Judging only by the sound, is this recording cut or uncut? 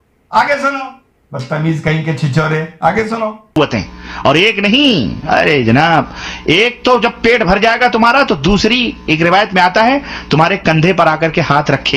cut